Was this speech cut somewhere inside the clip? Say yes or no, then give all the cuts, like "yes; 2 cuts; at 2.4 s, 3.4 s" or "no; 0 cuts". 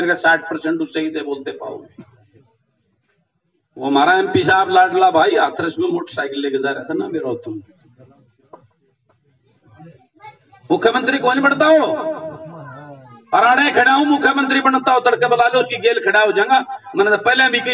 yes; 1 cut; at 9.6 s